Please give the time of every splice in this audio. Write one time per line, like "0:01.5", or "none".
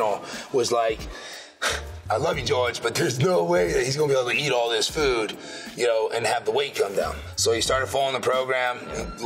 none